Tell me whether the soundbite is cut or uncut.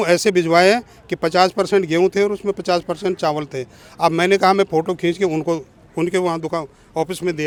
uncut